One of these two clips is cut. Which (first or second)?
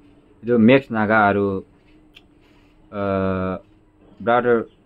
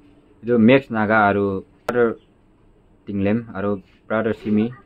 second